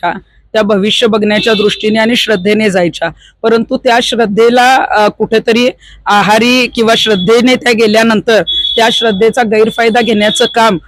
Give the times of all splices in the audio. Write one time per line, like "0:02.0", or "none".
none